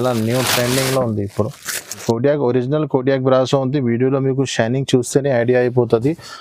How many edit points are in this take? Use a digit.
1